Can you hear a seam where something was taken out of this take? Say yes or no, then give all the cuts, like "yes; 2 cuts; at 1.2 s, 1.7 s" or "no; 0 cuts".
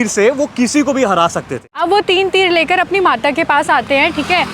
yes; 1 cut; at 1.7 s